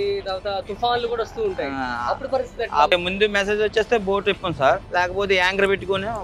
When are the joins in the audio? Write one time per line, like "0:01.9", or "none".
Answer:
0:02.9
0:04.8